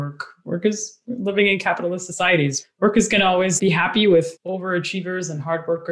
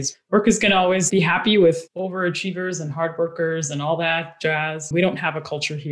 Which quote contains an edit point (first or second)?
second